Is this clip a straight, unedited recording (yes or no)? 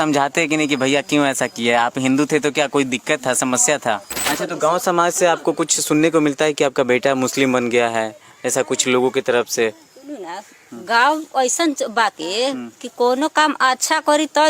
no